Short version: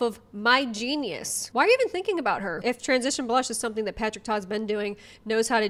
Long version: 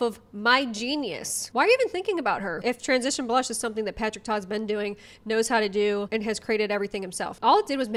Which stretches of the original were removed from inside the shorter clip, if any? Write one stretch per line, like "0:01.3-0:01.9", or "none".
none